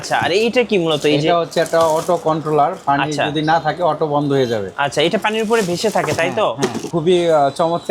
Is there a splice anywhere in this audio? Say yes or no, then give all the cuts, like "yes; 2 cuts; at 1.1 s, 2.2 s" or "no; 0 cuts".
yes; 1 cut; at 6.9 s